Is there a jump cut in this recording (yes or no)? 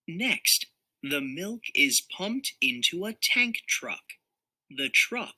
yes